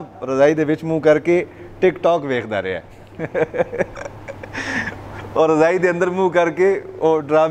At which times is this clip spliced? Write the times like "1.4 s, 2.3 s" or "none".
none